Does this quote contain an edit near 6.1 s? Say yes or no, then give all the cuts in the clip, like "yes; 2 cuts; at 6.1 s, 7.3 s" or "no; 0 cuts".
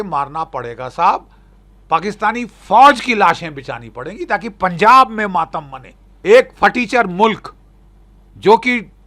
yes; 1 cut; at 6.1 s